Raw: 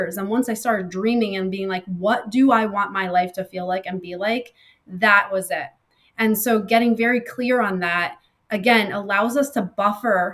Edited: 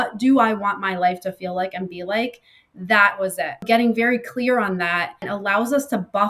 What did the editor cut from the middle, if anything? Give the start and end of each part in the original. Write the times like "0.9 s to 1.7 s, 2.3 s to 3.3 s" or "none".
5.8 s to 6.6 s, 8.3 s to 8.9 s